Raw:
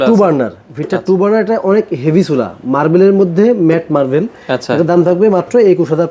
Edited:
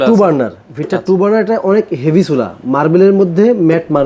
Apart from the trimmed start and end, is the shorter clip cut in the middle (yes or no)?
no